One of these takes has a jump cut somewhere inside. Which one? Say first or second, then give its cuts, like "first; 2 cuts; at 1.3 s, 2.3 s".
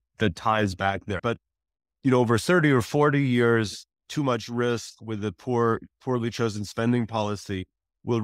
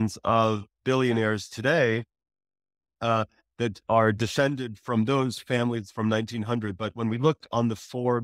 first; 2 cuts; at 1.2 s, 4.0 s